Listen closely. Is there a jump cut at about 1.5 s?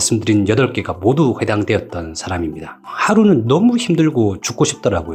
no; 1 cut; at 2.8 s

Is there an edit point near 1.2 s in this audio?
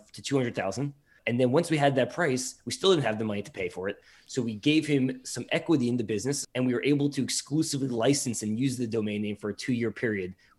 yes; 2 cuts; at 1.2 s, 6.4 s

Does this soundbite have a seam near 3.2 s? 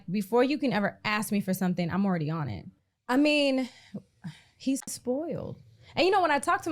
no; 1 cut; at 4.9 s

